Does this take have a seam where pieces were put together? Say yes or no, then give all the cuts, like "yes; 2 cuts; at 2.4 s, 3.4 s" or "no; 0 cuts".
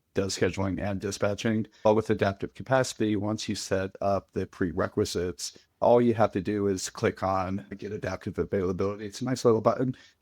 yes; 1 cut; at 1.8 s